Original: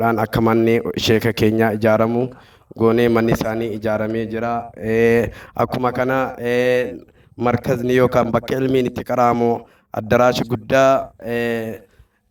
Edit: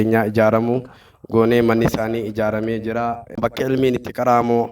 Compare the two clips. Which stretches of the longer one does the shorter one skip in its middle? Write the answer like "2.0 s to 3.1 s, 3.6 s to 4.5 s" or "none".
4.8 s to 8.3 s